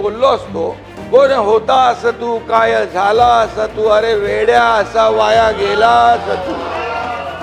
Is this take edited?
no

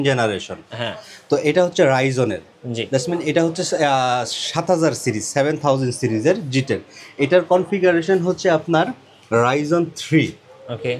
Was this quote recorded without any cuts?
yes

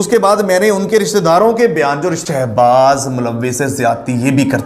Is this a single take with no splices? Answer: no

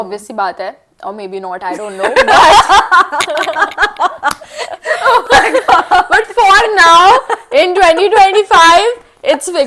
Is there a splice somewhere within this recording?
no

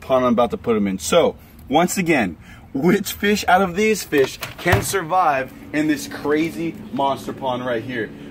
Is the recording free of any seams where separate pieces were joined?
yes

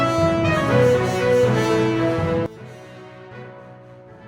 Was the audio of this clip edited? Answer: no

